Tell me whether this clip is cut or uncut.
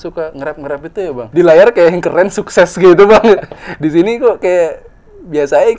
cut